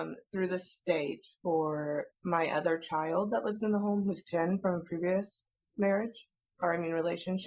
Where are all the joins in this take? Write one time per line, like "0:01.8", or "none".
none